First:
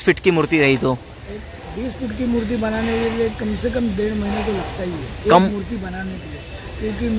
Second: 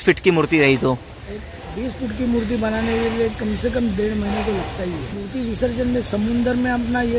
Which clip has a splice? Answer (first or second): second